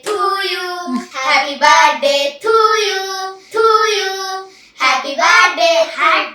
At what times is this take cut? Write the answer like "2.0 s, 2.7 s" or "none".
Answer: 1.1 s